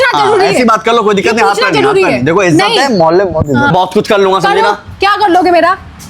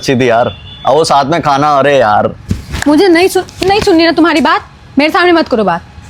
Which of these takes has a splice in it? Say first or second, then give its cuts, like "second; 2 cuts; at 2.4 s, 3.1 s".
first; 1 cut; at 3.7 s